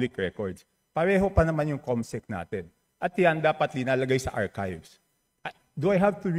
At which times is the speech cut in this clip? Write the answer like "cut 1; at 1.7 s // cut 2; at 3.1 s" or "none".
none